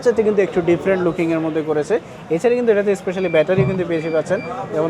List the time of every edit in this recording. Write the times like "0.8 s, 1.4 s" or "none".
none

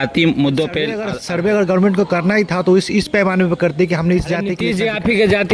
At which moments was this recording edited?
1.2 s, 4.6 s

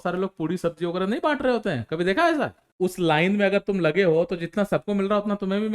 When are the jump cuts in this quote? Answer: 2.6 s

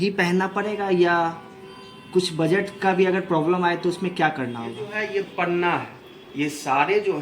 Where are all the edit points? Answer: 4.9 s

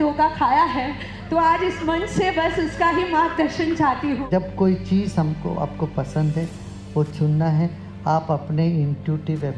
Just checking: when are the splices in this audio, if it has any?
4.2 s

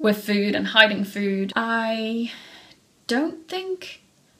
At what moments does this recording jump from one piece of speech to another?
1.5 s

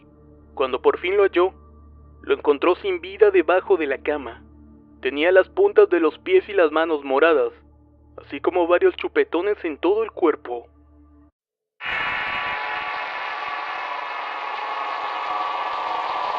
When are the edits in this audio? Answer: none

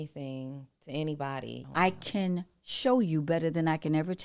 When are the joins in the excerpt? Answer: 1.6 s

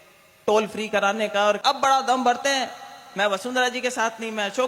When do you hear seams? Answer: 1.6 s

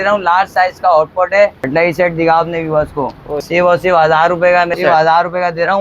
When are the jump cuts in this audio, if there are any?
1.7 s, 3.3 s, 4.7 s

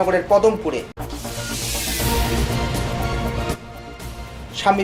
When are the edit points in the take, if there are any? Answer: none

